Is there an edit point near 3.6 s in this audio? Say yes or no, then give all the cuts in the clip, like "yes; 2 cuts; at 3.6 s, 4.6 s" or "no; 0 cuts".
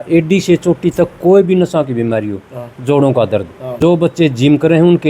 yes; 1 cut; at 3.6 s